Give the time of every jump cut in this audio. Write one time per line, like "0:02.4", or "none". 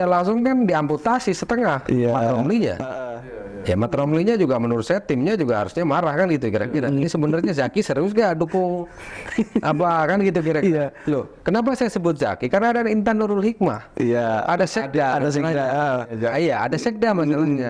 none